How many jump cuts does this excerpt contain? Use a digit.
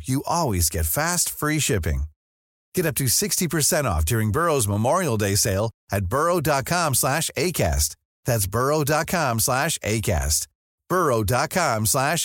0